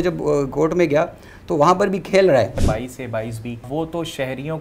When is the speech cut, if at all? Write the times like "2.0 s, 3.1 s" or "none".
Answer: 2.6 s, 3.7 s

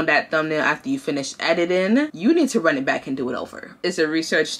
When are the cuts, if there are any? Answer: 2.1 s, 3.8 s

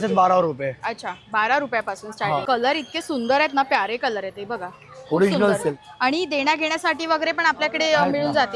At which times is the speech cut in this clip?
2.4 s, 5.6 s

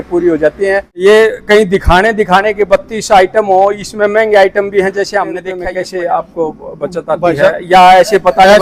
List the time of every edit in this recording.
0.9 s, 5.5 s

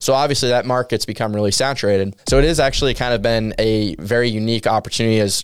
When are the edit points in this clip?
2.2 s

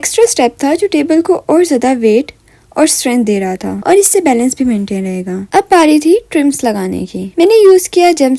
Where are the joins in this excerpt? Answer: none

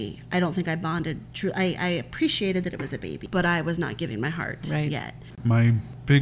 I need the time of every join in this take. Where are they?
3.2 s, 5.4 s

